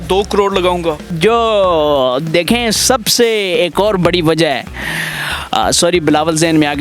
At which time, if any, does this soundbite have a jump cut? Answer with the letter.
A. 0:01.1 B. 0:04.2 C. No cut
A